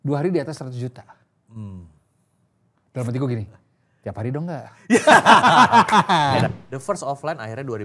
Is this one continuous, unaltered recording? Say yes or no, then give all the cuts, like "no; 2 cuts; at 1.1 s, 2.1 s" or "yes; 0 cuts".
no; 1 cut; at 6.5 s